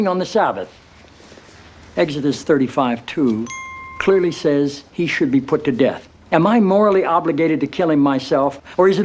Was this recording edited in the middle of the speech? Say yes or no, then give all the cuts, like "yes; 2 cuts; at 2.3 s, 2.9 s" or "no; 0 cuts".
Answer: no; 0 cuts